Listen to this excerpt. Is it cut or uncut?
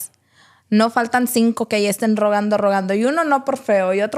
uncut